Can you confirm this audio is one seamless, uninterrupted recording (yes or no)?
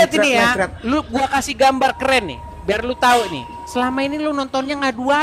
yes